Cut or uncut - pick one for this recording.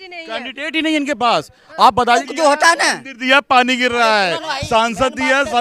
cut